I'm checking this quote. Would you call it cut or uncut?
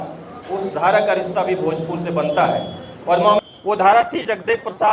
cut